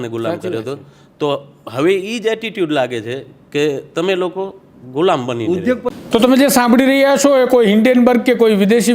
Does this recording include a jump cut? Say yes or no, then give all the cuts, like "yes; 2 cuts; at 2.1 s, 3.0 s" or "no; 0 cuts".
yes; 1 cut; at 5.9 s